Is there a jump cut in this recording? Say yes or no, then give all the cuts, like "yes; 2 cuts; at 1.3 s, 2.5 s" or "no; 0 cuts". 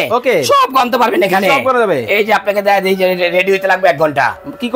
no; 0 cuts